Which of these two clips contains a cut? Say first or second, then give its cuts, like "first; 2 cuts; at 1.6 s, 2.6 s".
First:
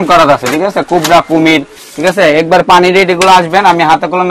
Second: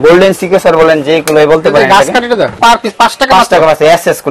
second; 1 cut; at 2.6 s